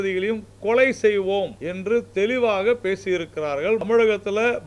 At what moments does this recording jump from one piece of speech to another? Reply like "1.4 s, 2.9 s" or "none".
1.6 s, 3.8 s